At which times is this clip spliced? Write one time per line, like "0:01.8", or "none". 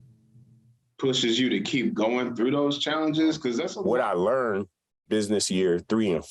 0:03.7